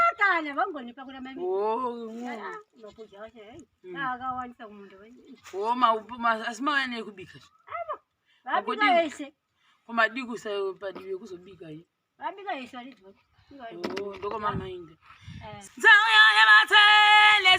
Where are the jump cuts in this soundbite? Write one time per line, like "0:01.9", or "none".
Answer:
0:15.5